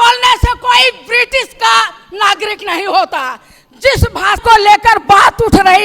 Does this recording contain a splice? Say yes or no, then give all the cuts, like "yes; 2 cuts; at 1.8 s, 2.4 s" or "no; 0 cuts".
yes; 1 cut; at 4.4 s